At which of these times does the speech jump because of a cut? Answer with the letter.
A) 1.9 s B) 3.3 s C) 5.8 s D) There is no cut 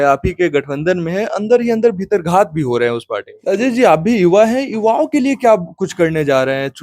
B